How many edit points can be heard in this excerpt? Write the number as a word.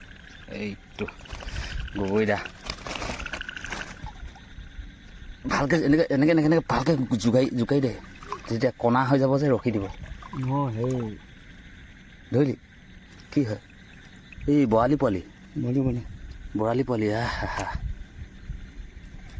one